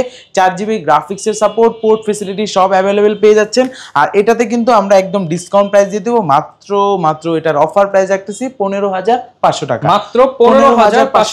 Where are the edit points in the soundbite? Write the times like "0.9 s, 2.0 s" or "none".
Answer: none